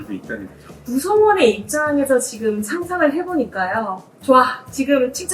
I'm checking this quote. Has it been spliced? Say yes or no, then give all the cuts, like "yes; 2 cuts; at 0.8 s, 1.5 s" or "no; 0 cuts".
yes; 2 cuts; at 0.8 s, 4.1 s